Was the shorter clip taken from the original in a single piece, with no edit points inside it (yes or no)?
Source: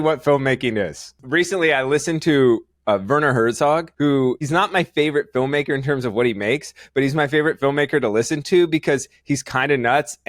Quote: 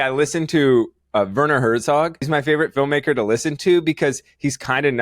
no